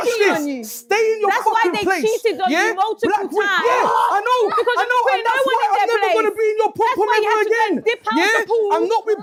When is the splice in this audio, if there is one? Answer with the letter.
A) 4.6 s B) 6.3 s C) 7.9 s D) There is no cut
D